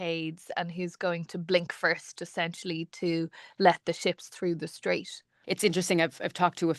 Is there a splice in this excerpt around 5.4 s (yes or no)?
yes